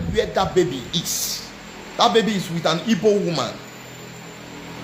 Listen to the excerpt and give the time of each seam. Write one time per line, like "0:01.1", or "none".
none

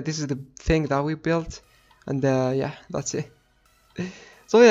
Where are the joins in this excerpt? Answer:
none

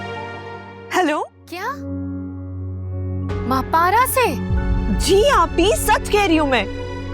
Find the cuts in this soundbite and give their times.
0:01.8

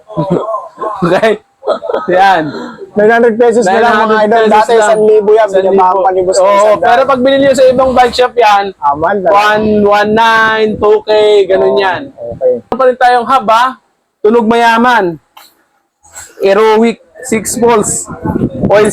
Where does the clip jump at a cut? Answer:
0:12.8

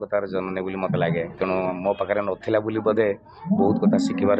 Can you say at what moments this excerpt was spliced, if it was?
none

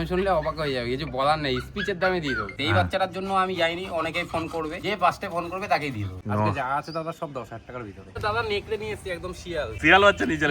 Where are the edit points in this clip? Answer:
0:02.6
0:04.8
0:06.1
0:08.2
0:09.8

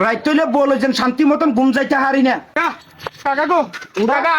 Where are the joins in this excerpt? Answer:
0:02.6

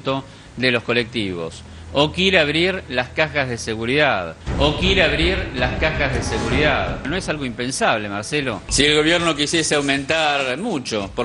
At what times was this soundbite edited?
0:08.6

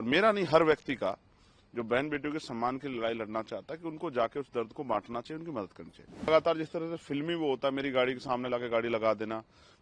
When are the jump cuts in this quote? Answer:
0:06.3

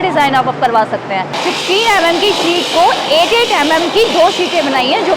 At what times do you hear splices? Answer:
0:01.3

